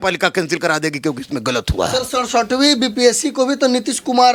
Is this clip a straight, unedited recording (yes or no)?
yes